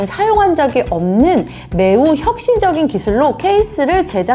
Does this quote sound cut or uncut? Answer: uncut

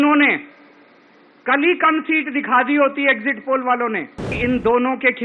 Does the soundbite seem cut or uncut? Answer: cut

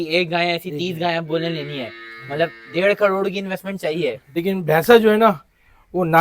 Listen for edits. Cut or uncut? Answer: cut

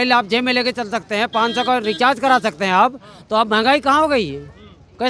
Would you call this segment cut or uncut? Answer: uncut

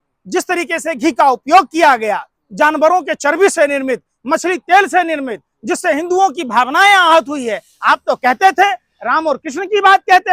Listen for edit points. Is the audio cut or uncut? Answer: uncut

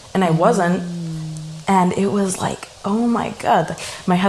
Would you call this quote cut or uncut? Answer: uncut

